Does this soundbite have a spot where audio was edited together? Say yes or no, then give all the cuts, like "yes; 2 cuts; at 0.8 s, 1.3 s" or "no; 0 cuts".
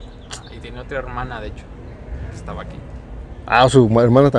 no; 0 cuts